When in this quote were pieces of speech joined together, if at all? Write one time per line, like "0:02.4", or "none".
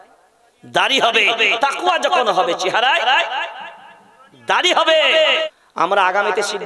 0:05.4